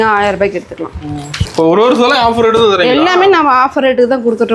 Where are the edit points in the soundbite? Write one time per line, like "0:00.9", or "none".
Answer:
0:01.4

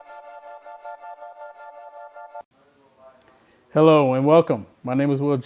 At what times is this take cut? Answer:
0:00.8
0:02.4

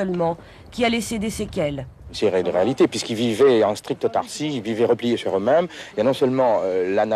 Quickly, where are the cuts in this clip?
0:02.1

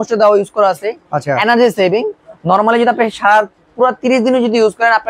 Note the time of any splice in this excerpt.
none

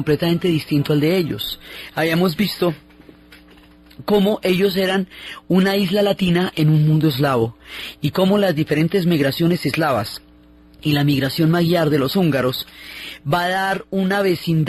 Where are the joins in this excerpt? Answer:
0:08.6

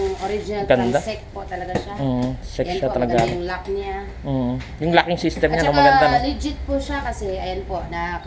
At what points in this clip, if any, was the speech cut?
none

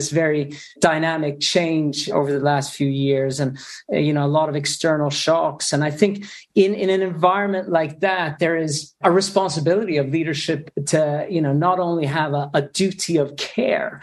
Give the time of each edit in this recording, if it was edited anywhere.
0:02.1

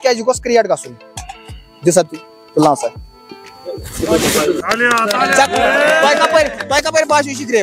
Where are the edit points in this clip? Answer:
0:04.6

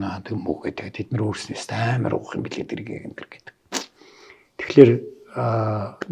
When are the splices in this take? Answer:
none

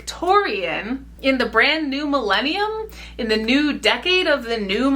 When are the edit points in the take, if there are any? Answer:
0:01.0

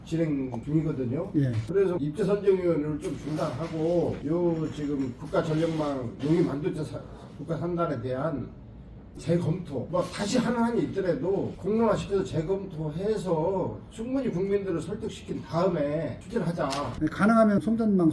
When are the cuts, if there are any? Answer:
0:02.0
0:09.1
0:16.9

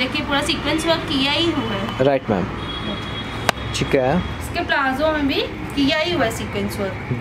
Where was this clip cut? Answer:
none

